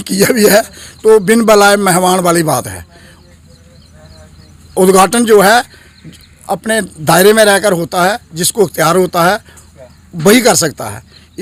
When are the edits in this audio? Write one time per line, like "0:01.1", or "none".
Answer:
none